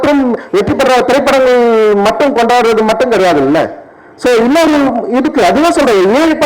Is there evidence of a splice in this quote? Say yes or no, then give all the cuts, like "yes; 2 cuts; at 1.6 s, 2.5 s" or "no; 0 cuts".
no; 0 cuts